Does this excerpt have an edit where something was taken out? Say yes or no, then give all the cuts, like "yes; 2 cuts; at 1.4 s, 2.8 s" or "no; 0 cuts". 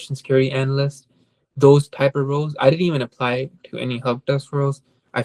no; 0 cuts